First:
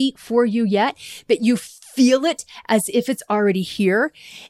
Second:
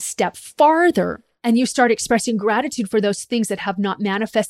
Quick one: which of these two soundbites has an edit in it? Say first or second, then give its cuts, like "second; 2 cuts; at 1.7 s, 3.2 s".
second; 1 cut; at 1.3 s